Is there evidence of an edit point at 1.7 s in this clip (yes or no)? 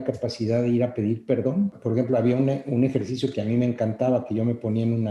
yes